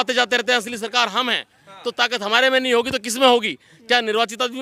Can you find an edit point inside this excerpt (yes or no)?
no